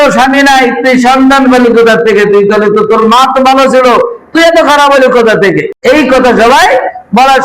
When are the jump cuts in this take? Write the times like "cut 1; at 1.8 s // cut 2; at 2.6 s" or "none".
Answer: cut 1; at 5.7 s